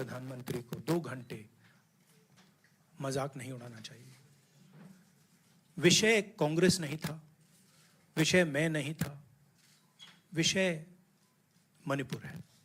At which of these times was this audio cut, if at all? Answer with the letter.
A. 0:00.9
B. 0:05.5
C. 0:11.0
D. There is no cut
A